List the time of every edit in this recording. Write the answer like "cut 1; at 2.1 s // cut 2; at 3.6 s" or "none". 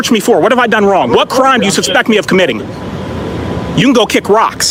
none